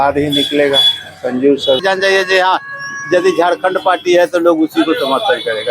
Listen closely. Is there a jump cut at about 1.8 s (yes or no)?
yes